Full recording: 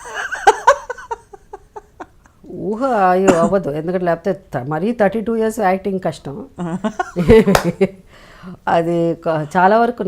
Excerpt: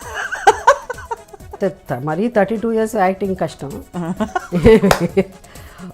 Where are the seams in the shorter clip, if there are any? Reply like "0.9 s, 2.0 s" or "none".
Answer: 1.6 s